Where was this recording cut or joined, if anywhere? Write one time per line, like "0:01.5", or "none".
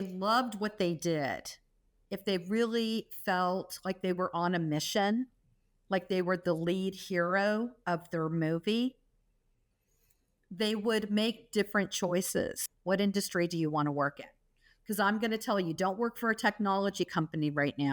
0:12.7